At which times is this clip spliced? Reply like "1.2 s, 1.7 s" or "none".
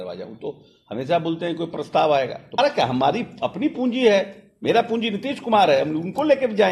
2.6 s